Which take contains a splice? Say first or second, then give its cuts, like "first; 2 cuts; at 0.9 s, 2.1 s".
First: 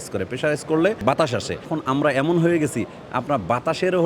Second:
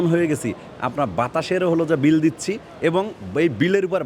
first; 1 cut; at 1.0 s